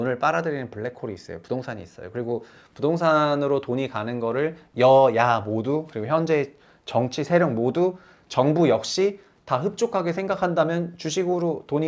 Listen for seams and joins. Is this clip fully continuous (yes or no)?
yes